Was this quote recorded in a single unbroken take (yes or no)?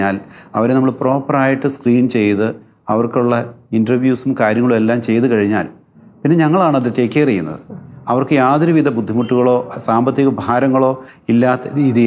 yes